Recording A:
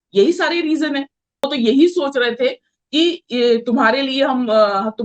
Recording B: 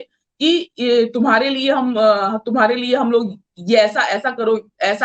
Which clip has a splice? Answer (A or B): A